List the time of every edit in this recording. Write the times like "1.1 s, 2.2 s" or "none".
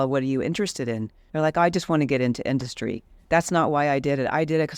1.2 s, 3.1 s